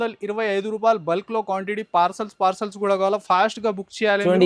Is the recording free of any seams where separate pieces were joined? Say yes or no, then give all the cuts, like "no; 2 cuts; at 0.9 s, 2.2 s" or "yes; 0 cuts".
yes; 0 cuts